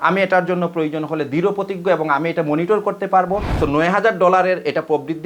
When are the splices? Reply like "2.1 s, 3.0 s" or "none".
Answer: 3.5 s